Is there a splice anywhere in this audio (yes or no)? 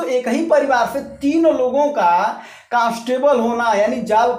no